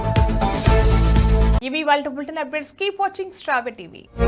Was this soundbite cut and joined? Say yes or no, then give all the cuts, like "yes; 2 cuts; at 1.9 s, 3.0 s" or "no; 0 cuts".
no; 0 cuts